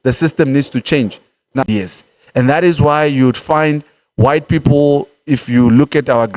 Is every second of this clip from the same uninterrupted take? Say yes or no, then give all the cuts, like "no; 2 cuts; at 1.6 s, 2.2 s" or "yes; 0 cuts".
no; 1 cut; at 1.6 s